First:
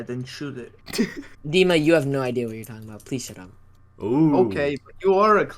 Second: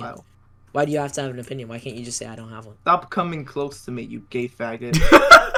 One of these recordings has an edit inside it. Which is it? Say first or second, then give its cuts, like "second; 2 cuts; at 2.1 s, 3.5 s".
first; 1 cut; at 1.3 s